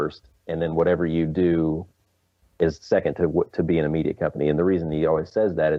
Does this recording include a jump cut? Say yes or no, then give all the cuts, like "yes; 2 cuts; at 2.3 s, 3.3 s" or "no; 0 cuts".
no; 0 cuts